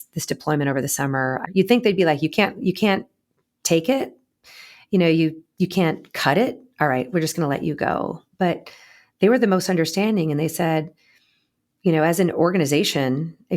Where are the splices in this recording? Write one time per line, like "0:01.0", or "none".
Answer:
0:01.4